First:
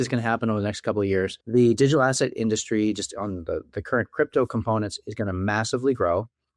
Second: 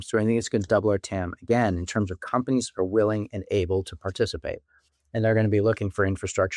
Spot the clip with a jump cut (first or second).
first